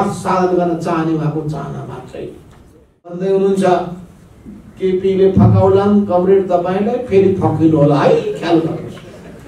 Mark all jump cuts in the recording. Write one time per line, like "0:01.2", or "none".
0:03.2